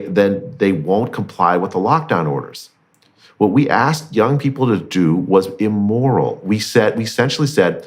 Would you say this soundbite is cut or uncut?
uncut